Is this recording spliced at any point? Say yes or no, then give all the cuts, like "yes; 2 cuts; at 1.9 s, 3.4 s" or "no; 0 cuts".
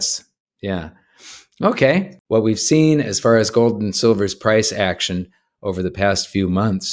yes; 1 cut; at 2.2 s